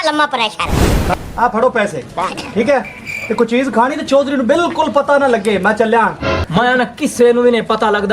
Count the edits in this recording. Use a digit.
1